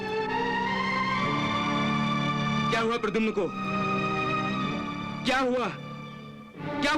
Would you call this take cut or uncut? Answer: uncut